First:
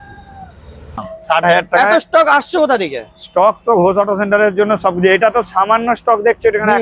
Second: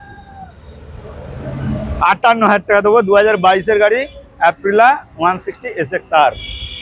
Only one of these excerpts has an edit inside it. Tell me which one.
first; 1 cut; at 1.1 s

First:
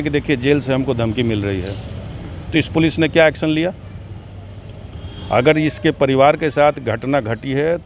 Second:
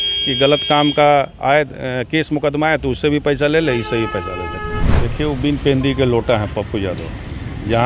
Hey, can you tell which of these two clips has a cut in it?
second; 1 cut; at 5.0 s

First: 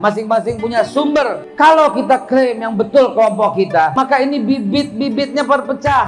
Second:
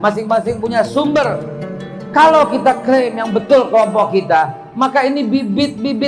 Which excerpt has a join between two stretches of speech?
first; 2 cuts; at 1.4 s, 3.9 s

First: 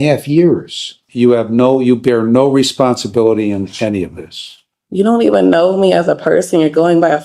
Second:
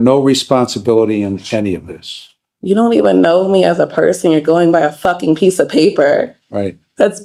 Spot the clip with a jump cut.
first; 1 cut; at 1.0 s

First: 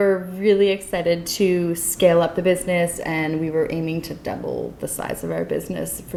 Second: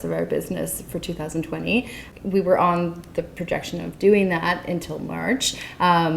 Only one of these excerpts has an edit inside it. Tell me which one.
second; 1 cut; at 2.0 s

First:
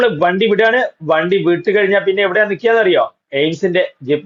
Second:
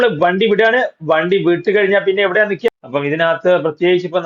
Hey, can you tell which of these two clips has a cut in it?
second; 1 cut; at 2.7 s

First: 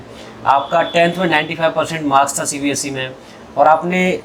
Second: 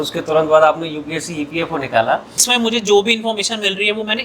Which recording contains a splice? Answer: second; 1 cut; at 2.5 s

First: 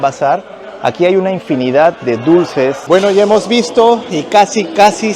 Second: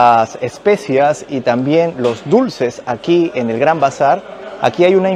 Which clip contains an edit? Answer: first; 1 cut; at 2.9 s

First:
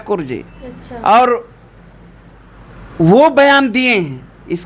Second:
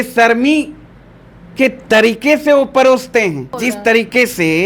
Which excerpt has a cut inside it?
second; 1 cut; at 3.6 s

